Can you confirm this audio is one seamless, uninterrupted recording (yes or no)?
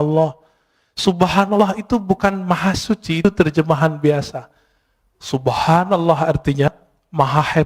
yes